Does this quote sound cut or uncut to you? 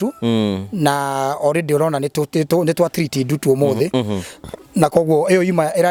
uncut